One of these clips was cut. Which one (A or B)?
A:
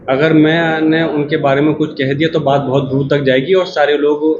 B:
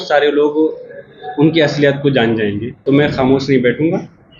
B